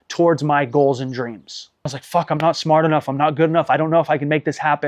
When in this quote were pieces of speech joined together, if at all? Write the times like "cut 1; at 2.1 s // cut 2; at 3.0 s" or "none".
cut 1; at 2.0 s

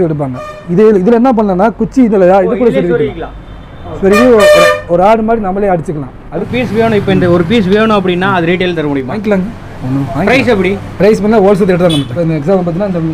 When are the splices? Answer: cut 1; at 6.5 s // cut 2; at 9.1 s // cut 3; at 12.1 s

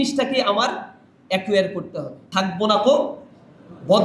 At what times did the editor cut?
cut 1; at 2.2 s

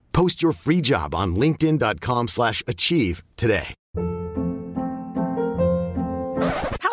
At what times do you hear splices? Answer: cut 1; at 3.8 s

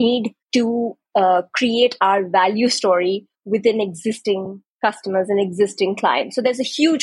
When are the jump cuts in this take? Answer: none

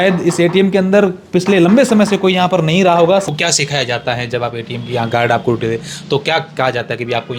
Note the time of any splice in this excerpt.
cut 1; at 3.2 s

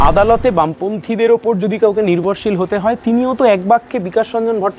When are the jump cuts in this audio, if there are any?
none

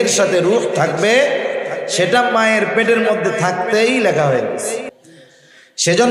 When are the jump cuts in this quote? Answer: cut 1; at 4.8 s

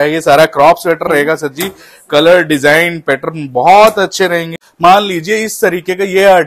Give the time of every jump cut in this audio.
cut 1; at 4.6 s

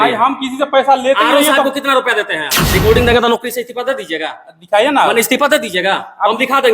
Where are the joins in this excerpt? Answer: cut 1; at 2.7 s

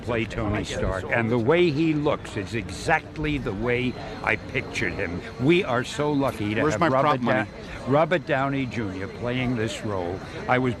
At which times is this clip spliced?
none

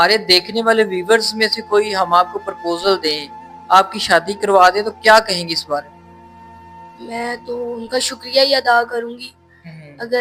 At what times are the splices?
none

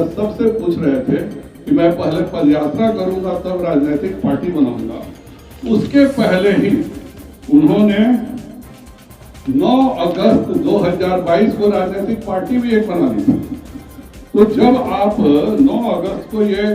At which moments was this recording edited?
none

